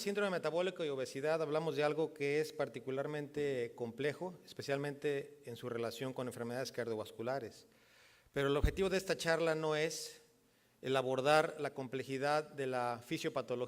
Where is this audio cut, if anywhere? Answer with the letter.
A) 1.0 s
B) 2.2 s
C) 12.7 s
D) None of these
C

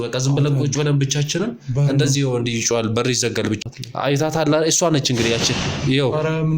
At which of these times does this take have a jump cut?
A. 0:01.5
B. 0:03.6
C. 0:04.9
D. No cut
B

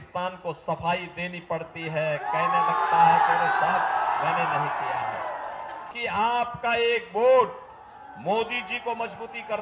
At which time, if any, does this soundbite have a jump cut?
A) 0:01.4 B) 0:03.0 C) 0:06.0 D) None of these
C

